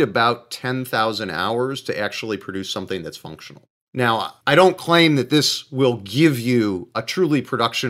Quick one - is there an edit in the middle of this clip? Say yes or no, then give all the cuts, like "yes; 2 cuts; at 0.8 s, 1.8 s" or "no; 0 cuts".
yes; 1 cut; at 4.4 s